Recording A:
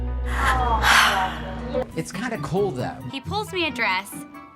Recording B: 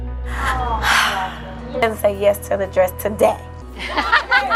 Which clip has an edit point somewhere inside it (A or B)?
A